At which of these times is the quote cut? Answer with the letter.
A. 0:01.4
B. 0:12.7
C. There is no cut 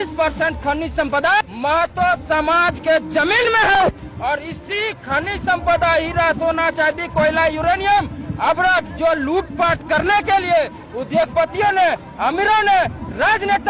A